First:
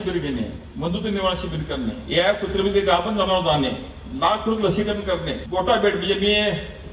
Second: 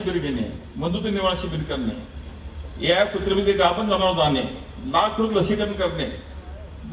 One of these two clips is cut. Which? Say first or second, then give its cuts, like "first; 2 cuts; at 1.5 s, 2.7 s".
first; 2 cuts; at 2.0 s, 5.4 s